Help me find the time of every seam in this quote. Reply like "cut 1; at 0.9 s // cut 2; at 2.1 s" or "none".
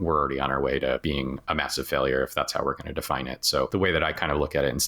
cut 1; at 1.0 s // cut 2; at 3.7 s